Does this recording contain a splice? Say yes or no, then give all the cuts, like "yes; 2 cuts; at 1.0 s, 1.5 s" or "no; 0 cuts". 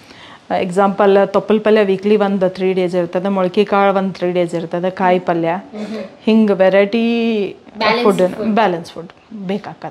no; 0 cuts